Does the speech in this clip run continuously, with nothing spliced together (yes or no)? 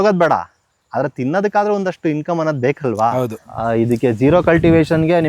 no